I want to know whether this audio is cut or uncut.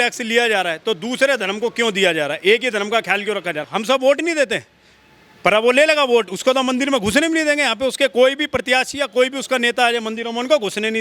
cut